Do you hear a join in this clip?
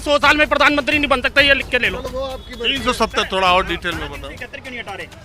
yes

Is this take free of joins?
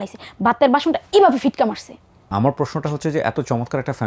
no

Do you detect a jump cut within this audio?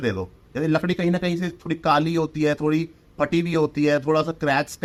no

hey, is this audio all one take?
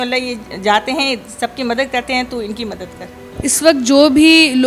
yes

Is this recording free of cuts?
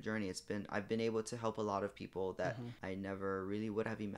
no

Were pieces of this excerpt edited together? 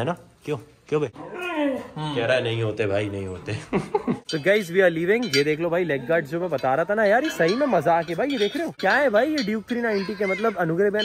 no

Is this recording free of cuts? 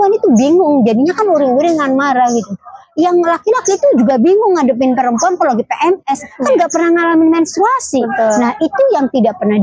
yes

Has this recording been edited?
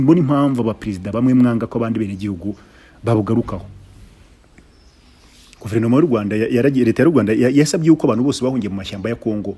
no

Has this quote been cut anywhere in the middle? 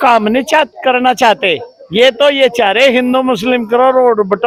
no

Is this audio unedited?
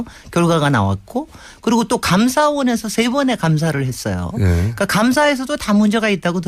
no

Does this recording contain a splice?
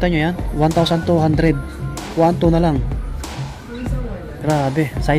no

